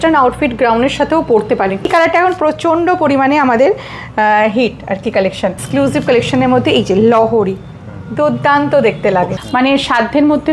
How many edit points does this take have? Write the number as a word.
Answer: three